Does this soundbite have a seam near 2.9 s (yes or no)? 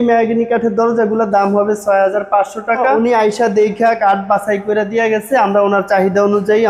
yes